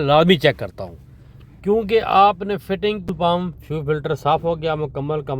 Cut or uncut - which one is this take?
cut